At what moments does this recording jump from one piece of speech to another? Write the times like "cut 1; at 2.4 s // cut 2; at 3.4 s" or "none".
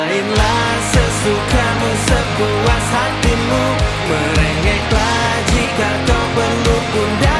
none